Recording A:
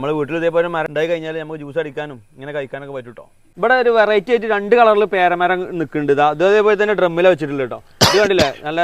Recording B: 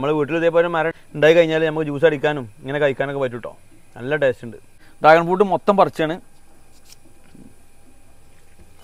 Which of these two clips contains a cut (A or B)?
A